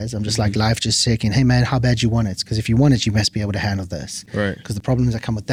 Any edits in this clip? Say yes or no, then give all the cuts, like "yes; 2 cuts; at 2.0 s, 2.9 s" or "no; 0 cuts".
no; 0 cuts